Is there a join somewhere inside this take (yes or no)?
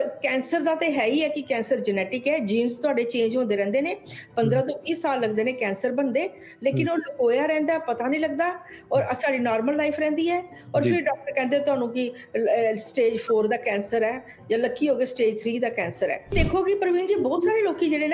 yes